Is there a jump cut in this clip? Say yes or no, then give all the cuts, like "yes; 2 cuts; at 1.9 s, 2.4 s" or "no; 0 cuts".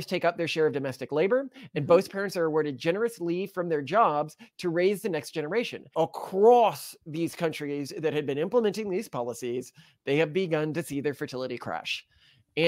yes; 1 cut; at 5.9 s